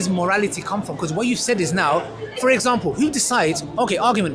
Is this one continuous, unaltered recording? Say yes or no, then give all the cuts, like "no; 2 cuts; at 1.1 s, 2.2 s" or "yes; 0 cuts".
yes; 0 cuts